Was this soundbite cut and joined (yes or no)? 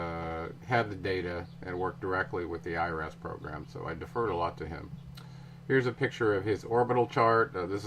yes